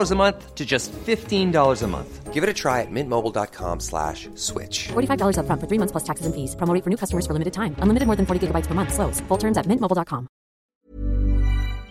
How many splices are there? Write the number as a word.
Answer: one